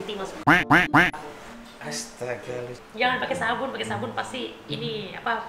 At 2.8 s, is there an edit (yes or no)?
yes